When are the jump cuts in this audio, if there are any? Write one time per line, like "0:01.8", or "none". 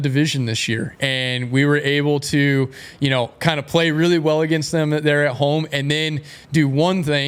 none